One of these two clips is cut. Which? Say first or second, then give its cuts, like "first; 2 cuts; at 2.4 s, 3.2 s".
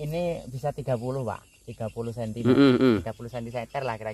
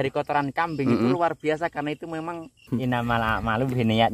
second; 1 cut; at 2.5 s